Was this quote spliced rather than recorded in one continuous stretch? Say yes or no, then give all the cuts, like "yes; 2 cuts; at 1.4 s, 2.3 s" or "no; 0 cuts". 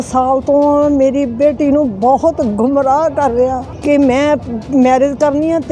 yes; 1 cut; at 3.7 s